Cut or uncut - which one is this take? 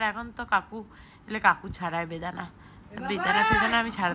uncut